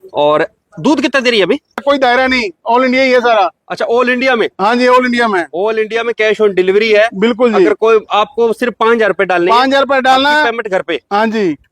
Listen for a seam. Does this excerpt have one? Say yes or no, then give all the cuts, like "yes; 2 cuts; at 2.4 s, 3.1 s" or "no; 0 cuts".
yes; 1 cut; at 1.8 s